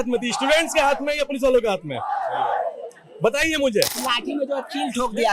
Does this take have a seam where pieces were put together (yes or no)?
yes